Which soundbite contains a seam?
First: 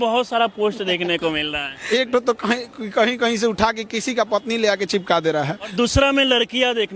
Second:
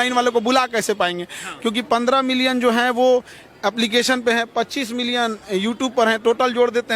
first; 2 cuts; at 1.8 s, 5.7 s

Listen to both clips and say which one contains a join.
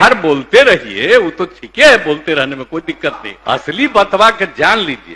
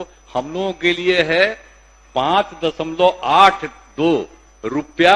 first; 1 cut; at 3.3 s

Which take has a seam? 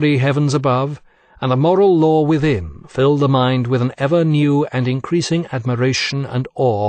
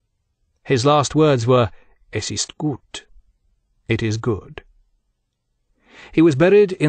second; 1 cut; at 1.1 s

